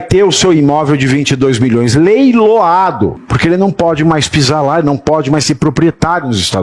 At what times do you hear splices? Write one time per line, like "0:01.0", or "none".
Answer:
0:03.2